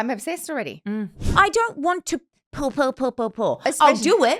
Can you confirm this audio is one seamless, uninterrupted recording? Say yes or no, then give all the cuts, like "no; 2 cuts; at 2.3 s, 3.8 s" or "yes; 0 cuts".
no; 1 cut; at 1.2 s